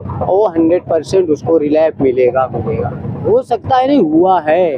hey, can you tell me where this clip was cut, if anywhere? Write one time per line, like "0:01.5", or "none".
0:03.2